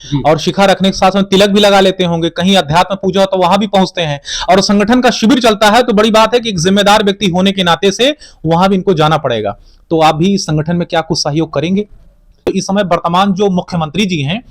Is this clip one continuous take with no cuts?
no; 1 cut; at 12.4 s

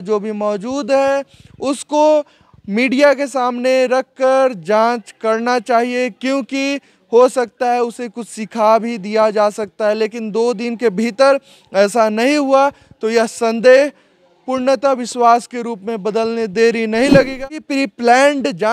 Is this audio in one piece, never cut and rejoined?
no; 1 cut; at 17.6 s

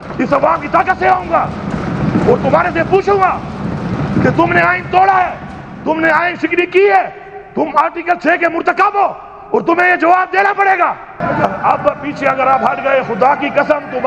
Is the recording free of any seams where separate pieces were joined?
no; 1 cut; at 11.2 s

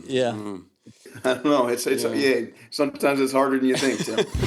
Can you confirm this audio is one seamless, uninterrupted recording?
no; 1 cut; at 1.1 s

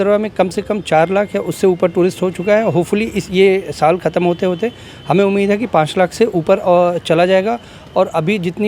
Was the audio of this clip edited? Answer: no; 0 cuts

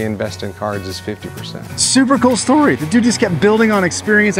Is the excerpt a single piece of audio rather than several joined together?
no; 1 cut; at 1.8 s

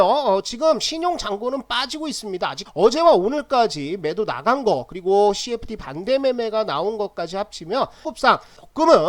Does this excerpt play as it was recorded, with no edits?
no; 2 cuts; at 2.6 s, 8.0 s

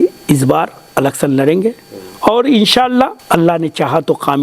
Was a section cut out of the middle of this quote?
yes; 1 cut; at 3.2 s

